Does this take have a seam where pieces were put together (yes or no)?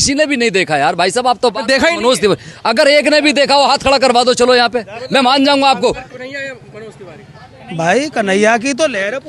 yes